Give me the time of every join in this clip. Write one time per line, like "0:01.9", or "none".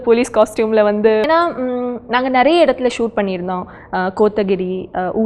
0:01.2